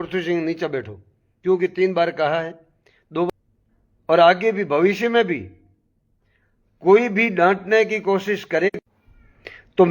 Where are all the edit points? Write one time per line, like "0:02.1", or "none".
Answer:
0:03.3